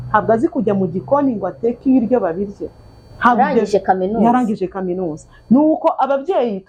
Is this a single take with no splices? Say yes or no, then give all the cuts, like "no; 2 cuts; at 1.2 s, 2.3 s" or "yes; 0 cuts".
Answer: yes; 0 cuts